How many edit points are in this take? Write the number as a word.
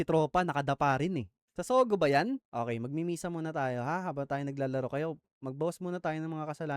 two